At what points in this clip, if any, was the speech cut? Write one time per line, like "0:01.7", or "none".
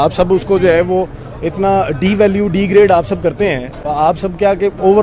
none